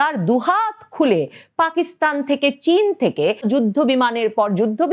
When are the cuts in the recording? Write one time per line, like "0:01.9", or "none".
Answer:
0:03.5

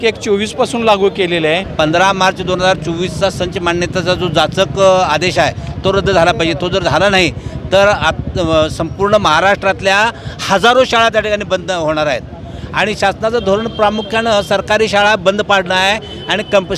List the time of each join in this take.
0:01.7

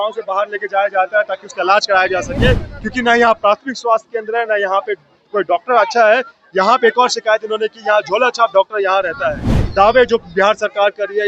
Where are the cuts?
0:09.6

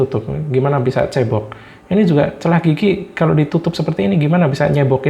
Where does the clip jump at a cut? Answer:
none

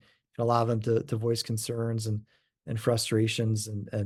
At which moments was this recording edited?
none

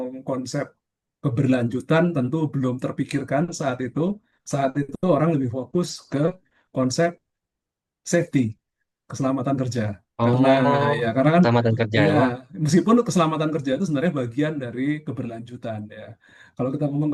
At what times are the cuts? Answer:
none

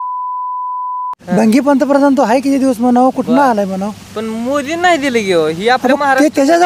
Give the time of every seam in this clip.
0:01.1

